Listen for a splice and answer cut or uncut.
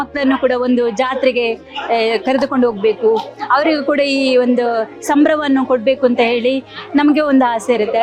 uncut